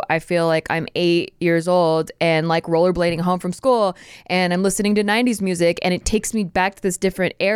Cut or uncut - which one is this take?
uncut